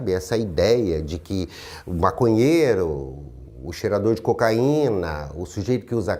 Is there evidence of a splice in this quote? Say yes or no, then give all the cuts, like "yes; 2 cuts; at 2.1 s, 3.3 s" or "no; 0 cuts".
no; 0 cuts